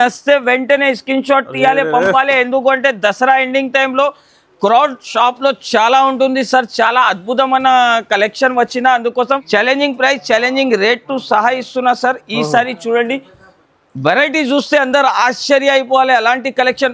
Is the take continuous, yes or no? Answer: no